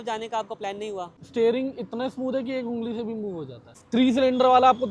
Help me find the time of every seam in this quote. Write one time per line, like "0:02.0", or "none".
0:01.2
0:03.8